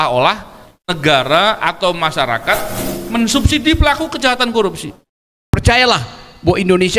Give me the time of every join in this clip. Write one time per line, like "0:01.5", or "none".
0:05.5